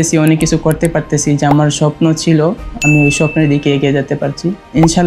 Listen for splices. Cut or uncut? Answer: uncut